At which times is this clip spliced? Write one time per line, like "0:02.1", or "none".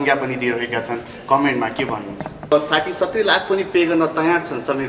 0:02.5

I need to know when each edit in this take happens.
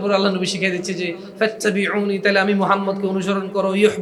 none

